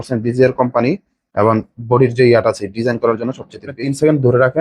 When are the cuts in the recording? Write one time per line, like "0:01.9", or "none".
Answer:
0:03.7

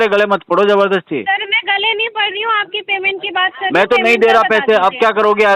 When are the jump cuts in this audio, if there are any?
none

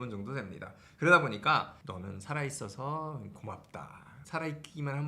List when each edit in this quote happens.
0:01.8
0:04.1

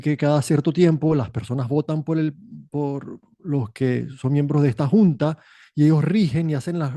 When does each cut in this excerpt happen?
none

